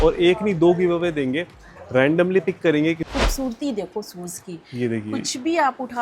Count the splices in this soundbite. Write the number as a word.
one